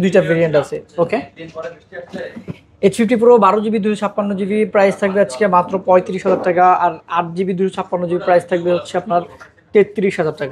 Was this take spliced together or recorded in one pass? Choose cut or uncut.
uncut